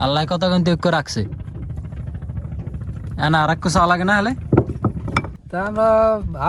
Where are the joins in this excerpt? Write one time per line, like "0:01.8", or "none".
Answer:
0:05.4